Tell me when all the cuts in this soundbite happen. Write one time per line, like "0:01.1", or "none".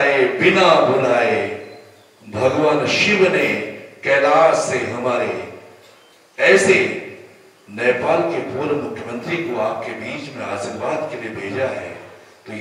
none